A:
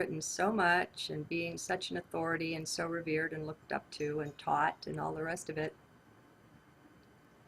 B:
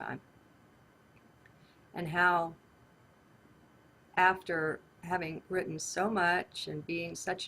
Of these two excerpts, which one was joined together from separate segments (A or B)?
B